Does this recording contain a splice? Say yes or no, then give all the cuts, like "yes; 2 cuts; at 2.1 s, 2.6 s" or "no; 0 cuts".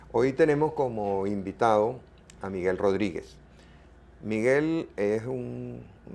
no; 0 cuts